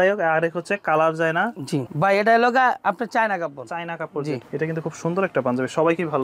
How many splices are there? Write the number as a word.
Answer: two